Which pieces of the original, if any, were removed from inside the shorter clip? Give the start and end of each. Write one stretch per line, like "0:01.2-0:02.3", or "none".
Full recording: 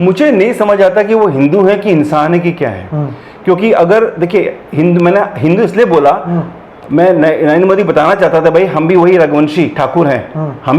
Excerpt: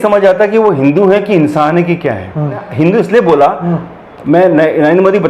0:03.2-0:05.3